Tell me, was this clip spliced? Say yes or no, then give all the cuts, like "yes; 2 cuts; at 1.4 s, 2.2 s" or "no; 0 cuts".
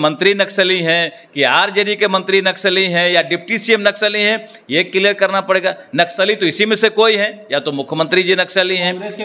no; 0 cuts